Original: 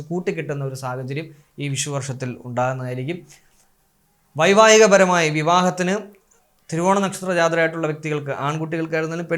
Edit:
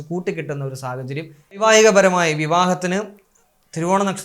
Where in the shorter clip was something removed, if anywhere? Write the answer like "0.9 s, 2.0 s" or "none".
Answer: 1.6 s